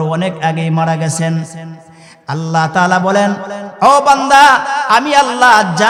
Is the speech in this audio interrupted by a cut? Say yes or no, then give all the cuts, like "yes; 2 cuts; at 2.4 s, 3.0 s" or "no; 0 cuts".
no; 0 cuts